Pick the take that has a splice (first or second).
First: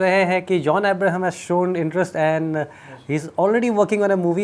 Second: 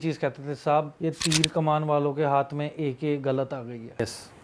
second